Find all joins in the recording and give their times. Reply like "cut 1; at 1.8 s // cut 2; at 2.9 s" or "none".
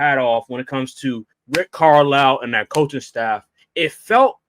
cut 1; at 1.3 s // cut 2; at 3.6 s